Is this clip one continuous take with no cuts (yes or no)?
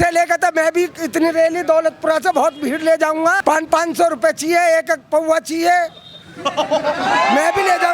no